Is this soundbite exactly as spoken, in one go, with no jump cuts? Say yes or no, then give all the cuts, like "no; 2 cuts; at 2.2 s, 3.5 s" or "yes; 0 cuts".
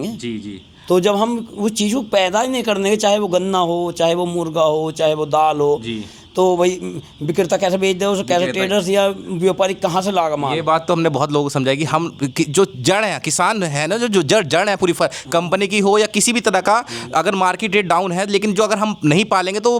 yes; 0 cuts